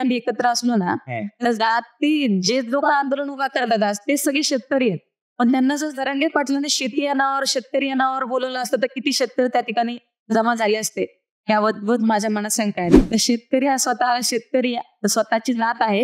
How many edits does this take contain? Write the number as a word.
one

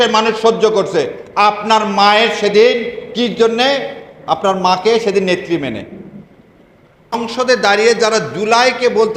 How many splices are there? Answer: one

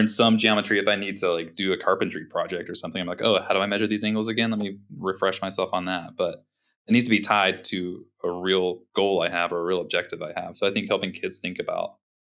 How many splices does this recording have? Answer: zero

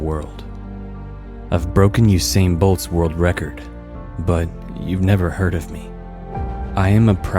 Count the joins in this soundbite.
zero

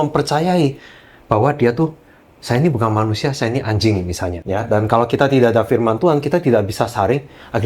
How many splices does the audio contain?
one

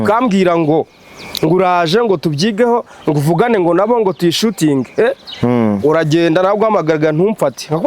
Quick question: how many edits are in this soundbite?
zero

